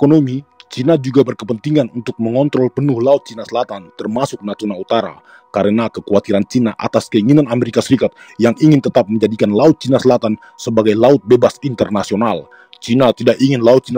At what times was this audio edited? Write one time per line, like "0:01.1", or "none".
none